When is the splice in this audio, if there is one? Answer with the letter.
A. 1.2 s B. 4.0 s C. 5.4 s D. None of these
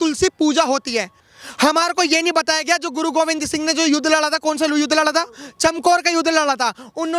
D